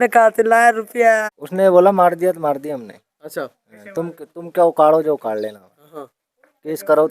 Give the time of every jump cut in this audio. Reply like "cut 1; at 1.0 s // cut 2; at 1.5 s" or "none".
cut 1; at 1.4 s

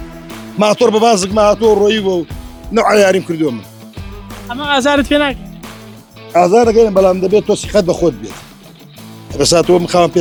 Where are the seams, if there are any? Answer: none

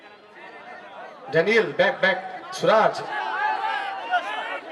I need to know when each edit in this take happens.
cut 1; at 3.1 s

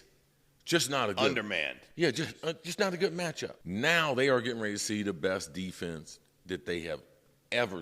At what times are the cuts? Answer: cut 1; at 3.5 s

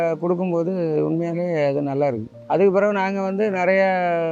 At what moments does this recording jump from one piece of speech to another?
none

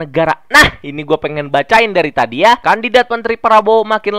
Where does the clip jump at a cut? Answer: cut 1; at 2.6 s

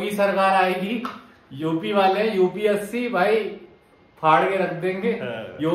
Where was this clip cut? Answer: none

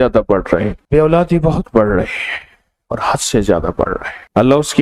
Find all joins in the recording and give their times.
none

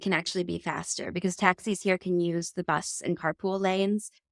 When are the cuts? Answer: none

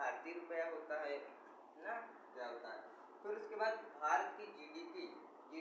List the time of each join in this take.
none

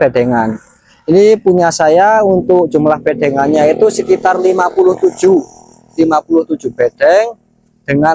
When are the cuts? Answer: none

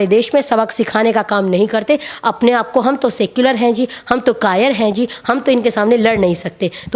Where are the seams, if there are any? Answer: none

